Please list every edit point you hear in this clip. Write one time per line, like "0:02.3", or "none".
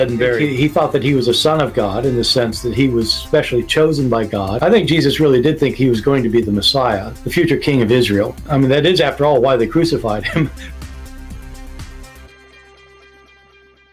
none

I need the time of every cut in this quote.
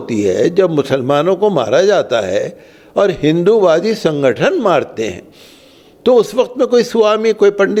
none

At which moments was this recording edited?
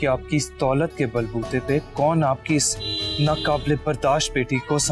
none

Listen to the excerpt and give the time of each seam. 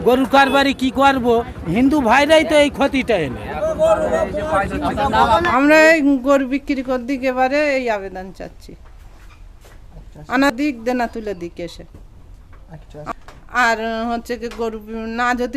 0:05.5

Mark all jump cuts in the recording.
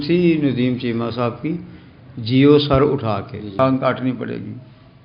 0:03.6

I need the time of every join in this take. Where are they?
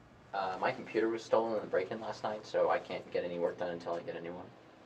0:03.8

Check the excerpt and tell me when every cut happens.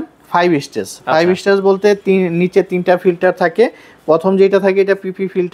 none

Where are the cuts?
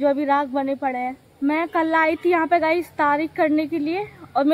none

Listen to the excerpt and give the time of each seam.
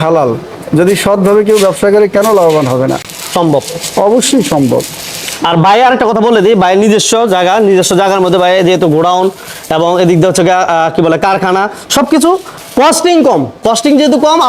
none

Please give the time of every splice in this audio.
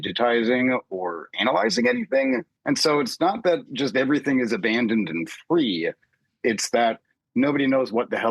0:02.5

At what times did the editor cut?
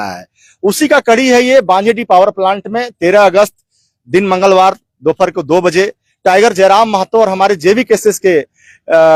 none

